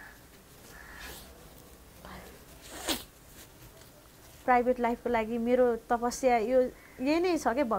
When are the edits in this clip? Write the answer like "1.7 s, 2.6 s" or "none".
4.4 s